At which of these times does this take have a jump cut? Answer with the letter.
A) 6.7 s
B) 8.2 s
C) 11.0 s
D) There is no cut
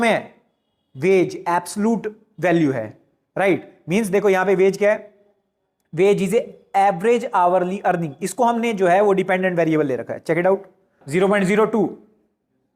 C